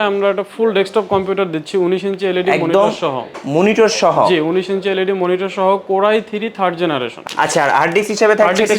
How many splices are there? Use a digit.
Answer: 1